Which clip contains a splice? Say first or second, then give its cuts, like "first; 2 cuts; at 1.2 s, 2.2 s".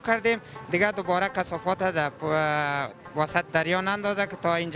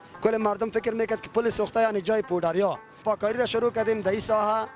second; 1 cut; at 3.0 s